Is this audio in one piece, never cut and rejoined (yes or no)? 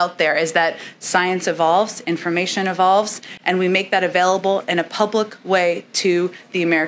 yes